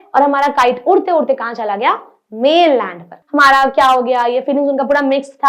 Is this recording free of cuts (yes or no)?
no